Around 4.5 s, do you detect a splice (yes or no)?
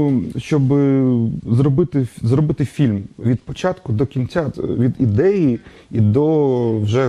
yes